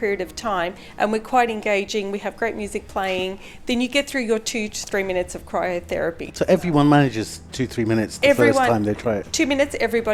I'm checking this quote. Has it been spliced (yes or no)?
no